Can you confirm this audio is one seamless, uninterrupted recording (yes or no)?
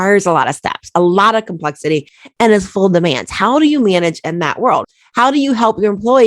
no